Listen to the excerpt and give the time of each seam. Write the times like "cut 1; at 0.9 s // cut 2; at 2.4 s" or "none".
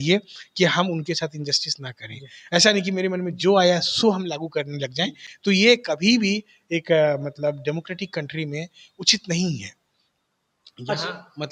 none